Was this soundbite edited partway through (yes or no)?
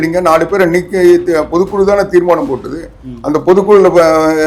no